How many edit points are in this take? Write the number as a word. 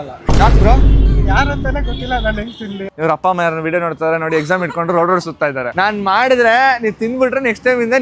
two